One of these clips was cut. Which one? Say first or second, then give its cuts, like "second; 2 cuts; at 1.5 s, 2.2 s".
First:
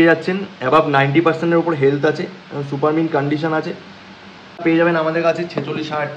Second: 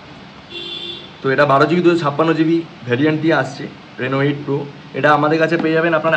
first; 1 cut; at 4.6 s